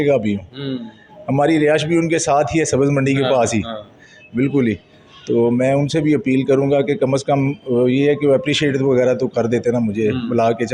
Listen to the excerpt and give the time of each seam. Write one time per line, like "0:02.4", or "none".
none